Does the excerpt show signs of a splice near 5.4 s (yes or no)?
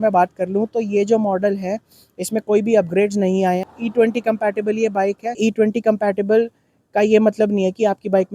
yes